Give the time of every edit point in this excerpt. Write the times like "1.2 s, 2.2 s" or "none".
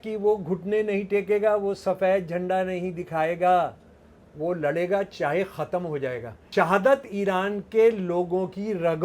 6.3 s